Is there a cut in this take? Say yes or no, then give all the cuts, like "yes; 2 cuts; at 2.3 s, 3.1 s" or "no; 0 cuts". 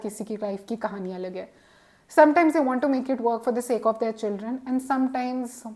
no; 0 cuts